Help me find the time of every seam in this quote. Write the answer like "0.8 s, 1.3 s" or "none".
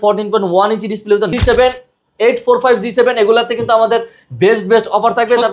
1.3 s